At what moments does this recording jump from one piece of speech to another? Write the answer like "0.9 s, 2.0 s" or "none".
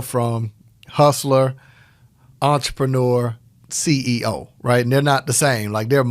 none